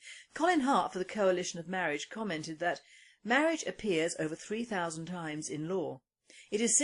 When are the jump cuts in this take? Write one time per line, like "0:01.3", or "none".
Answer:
0:01.1